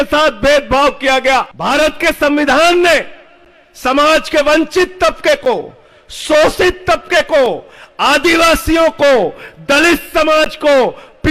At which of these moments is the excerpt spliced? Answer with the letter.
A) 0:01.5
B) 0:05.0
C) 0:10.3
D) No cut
A